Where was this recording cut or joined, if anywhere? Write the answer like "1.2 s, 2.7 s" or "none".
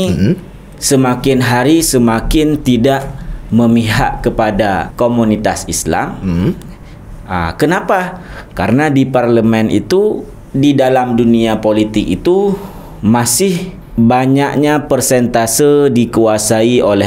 4.9 s, 13.8 s